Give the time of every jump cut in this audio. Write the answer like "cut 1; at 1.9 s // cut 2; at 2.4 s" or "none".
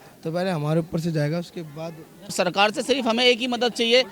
cut 1; at 2.3 s